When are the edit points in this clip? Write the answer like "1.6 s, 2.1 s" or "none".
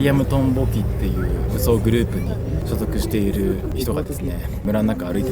1.5 s, 2.6 s, 3.7 s